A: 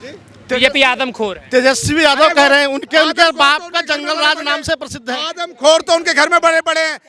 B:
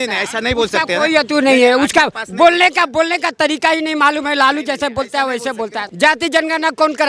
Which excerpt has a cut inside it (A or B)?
B